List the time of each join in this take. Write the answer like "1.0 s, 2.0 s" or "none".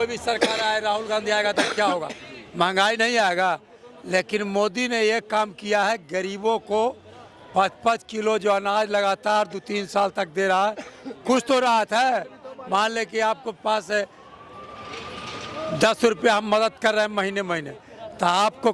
none

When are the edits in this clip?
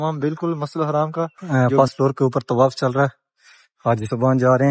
1.4 s

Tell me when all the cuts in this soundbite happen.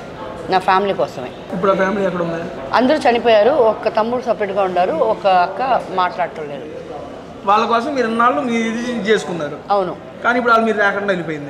1.4 s, 2.6 s

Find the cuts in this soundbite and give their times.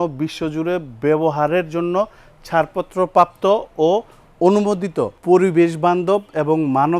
5.2 s

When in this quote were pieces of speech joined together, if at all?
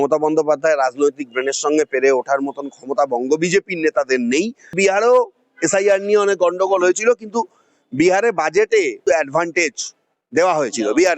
4.8 s, 9.0 s

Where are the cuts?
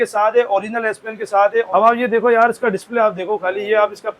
1.7 s

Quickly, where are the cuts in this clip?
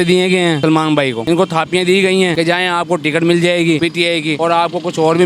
0.7 s, 2.3 s, 4.1 s

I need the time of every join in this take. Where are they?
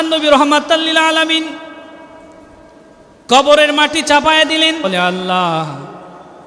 4.8 s

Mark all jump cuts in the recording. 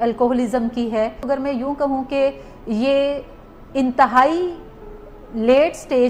1.3 s

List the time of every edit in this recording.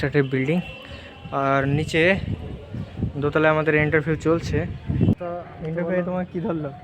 5.2 s

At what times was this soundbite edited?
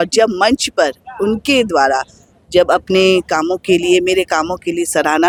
none

